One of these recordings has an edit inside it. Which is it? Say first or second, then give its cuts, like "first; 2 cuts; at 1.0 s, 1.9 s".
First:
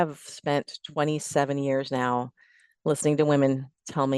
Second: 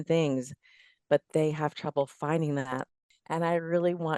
second; 1 cut; at 2.8 s